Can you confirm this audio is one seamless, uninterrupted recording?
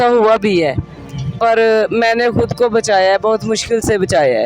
yes; 0 cuts

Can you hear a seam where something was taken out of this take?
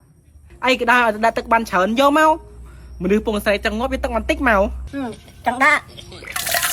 yes; 1 cut; at 4.9 s

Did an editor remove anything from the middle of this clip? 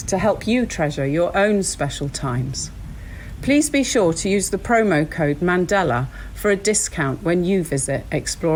no; 0 cuts

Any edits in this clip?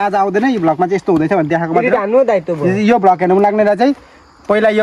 no; 0 cuts

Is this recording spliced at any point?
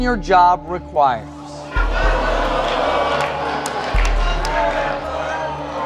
no; 0 cuts

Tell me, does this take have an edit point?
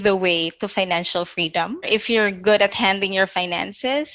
yes; 1 cut; at 1.8 s

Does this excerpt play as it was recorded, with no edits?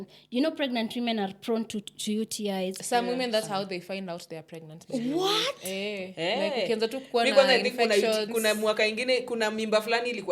yes; 0 cuts

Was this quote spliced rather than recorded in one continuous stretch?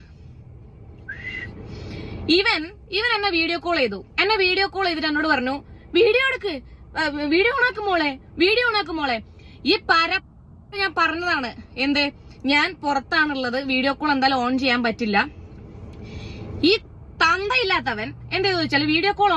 no; 0 cuts

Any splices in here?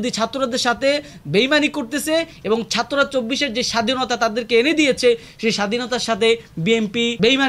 no; 0 cuts

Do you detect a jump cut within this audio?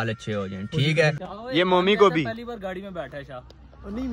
yes; 1 cut; at 1.3 s

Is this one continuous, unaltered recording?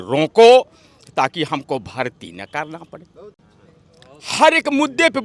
yes; 0 cuts

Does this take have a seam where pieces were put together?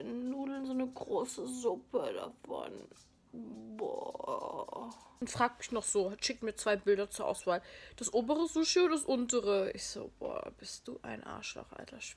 yes; 1 cut; at 5.2 s

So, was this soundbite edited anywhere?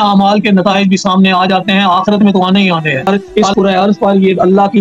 yes; 1 cut; at 3.1 s

